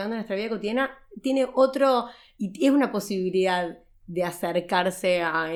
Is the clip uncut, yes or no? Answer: yes